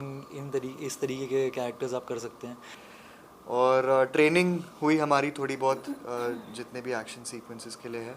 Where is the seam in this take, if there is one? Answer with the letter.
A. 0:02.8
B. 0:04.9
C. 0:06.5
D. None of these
A